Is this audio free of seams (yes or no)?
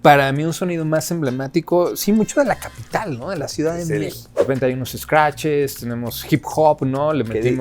no